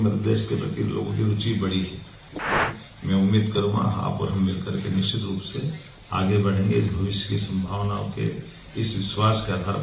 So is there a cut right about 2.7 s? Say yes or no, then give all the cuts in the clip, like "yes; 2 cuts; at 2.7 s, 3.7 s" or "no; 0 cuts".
yes; 1 cut; at 2.7 s